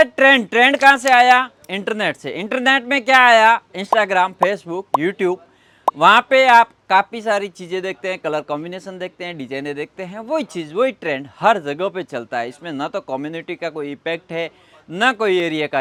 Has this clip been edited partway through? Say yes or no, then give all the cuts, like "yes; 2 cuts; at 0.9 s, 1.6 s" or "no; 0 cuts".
no; 0 cuts